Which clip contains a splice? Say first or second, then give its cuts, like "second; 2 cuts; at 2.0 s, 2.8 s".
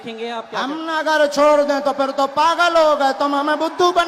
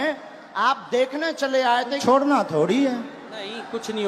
second; 1 cut; at 2.0 s